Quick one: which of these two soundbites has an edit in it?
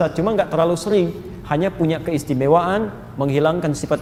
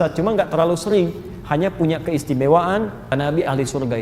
second; 1 cut; at 3.1 s

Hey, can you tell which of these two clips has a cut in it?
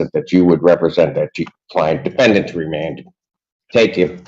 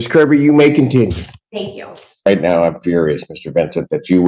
second; 1 cut; at 2.2 s

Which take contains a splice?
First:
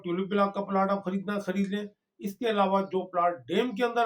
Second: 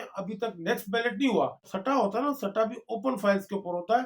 second; 1 cut; at 1.7 s

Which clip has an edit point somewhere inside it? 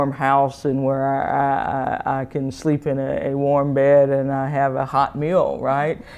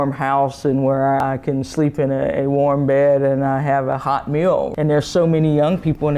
second; 2 cuts; at 1.2 s, 4.7 s

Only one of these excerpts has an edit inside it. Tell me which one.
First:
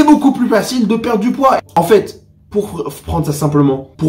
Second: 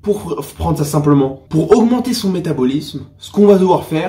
first; 1 cut; at 1.6 s

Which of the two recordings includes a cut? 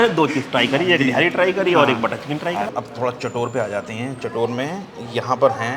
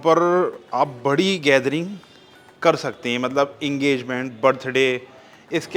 first; 1 cut; at 2.7 s

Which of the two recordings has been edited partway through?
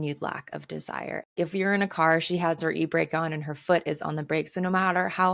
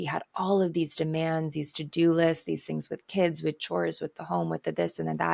first; 1 cut; at 1.3 s

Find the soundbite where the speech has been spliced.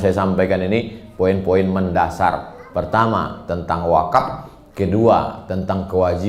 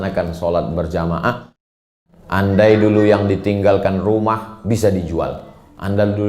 second; 1 cut; at 1.8 s

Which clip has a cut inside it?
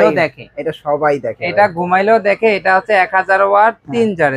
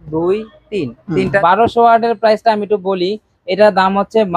second; 1 cut; at 1.4 s

